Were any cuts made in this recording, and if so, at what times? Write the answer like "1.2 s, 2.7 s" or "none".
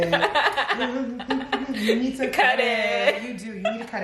none